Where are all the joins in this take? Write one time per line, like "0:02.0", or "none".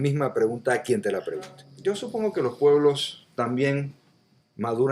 0:01.7